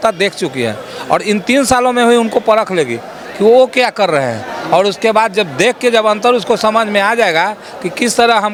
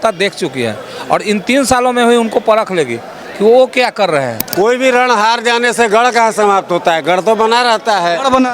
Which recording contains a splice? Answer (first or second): second